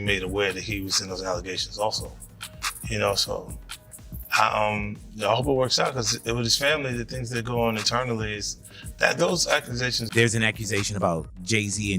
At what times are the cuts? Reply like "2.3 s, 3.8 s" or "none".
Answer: 10.0 s

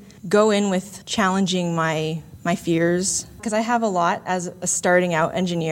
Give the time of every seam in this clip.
3.4 s

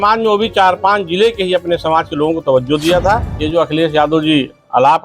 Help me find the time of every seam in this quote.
3.3 s

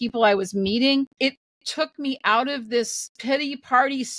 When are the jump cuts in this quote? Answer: 1.1 s, 3.1 s

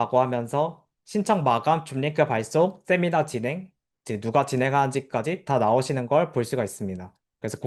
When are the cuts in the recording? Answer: none

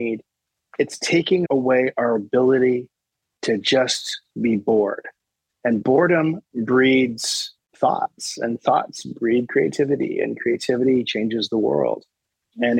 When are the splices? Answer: 1.4 s

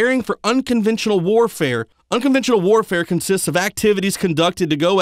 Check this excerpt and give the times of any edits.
1.7 s

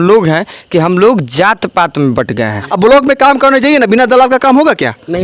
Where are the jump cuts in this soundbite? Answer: 2.6 s

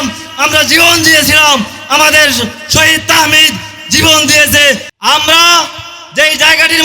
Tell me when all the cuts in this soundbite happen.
4.9 s

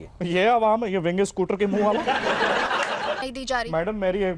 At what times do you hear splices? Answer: 3.3 s

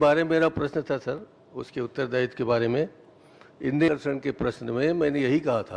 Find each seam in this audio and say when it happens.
3.9 s

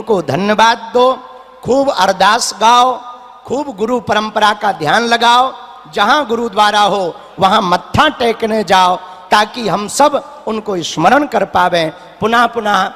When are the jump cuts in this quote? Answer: none

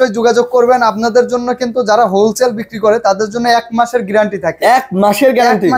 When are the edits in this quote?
none

